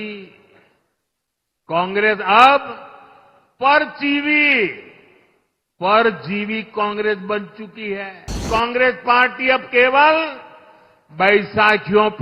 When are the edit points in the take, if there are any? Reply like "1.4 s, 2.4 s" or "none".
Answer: 8.4 s